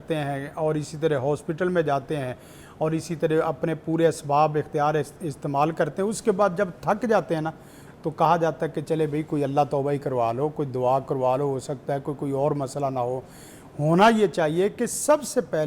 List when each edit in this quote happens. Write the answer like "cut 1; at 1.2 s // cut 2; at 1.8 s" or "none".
none